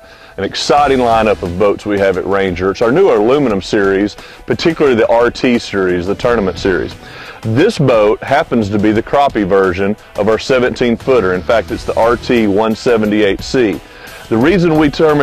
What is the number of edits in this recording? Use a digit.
0